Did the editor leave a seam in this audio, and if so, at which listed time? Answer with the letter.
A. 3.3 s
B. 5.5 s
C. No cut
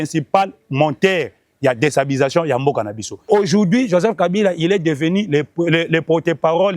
A